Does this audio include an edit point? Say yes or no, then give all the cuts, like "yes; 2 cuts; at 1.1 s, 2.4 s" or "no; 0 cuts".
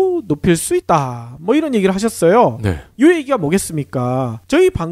no; 0 cuts